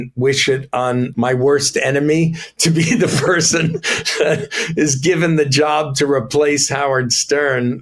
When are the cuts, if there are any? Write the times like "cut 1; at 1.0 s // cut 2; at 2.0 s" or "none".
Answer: cut 1; at 1.1 s